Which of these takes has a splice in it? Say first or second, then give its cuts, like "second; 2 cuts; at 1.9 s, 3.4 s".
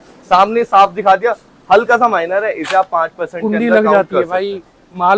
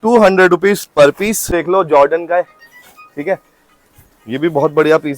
second; 1 cut; at 1.5 s